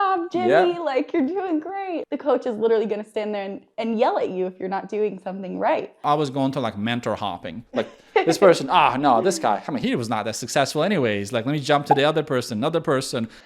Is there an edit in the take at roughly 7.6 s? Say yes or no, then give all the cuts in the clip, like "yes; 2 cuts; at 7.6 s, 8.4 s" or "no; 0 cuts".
no; 1 cut; at 6.0 s